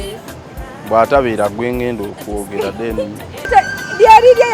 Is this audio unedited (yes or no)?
no